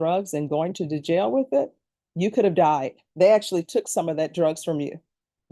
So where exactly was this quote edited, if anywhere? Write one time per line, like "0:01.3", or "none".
0:03.0